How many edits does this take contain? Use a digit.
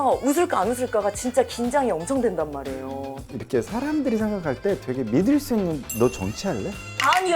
1